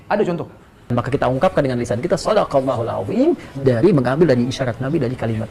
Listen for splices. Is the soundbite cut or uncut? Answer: cut